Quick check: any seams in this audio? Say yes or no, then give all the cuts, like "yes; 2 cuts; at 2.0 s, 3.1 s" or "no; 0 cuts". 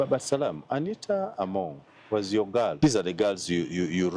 yes; 1 cut; at 2.8 s